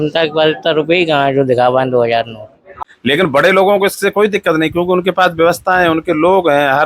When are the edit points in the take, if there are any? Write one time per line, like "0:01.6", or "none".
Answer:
0:02.6